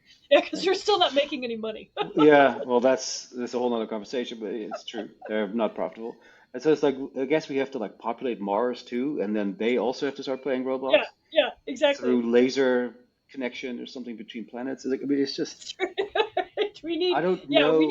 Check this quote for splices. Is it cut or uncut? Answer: cut